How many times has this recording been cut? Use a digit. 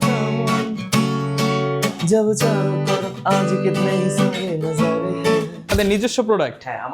1